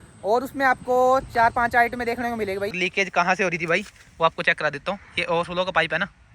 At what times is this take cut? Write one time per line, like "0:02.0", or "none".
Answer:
0:02.8